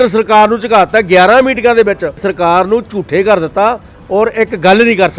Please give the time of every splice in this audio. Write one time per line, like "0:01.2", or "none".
0:02.3